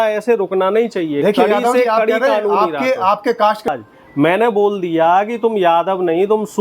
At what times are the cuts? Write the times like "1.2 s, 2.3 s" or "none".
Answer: 3.7 s